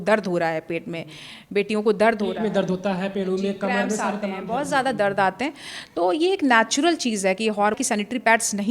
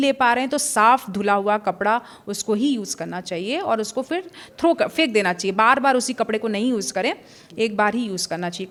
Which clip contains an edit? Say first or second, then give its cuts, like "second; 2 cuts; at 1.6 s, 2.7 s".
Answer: first; 1 cut; at 7.8 s